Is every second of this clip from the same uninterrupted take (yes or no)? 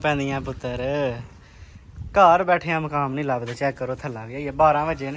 yes